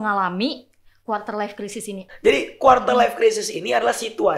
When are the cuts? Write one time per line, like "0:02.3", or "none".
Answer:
0:02.1